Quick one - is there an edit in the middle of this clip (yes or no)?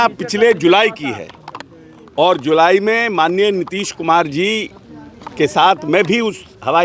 no